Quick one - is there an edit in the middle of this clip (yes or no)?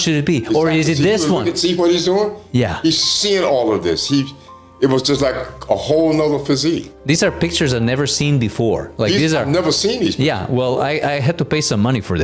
no